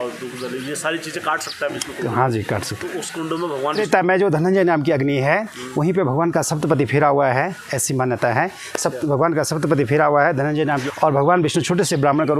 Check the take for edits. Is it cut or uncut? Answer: cut